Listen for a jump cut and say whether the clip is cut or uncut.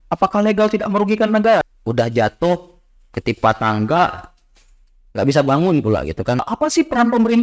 cut